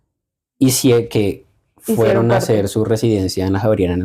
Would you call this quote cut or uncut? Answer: uncut